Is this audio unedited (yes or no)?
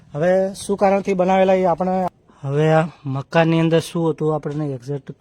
no